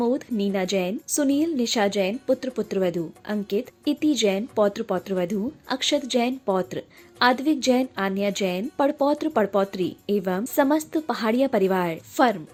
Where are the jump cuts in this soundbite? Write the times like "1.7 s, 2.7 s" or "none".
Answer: none